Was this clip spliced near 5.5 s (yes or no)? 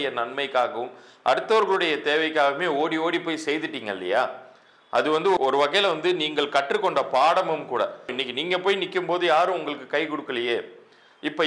no